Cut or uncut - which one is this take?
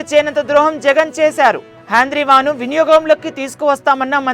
uncut